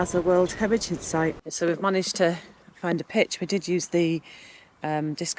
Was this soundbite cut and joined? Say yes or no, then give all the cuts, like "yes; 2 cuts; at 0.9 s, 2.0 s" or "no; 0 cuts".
yes; 1 cut; at 1.5 s